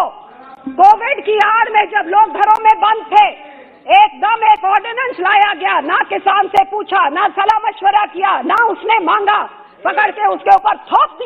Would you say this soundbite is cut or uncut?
uncut